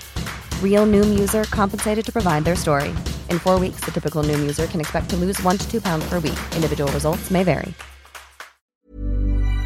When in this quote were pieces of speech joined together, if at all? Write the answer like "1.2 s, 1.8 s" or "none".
8.7 s